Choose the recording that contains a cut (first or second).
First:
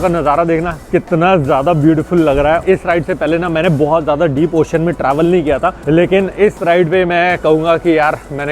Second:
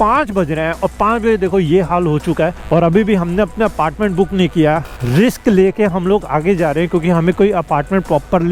first